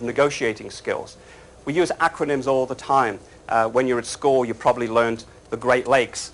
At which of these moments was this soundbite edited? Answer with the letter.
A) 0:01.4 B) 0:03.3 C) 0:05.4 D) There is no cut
A